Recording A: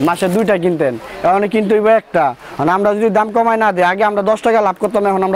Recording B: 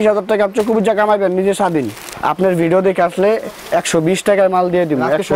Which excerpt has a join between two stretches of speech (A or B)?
B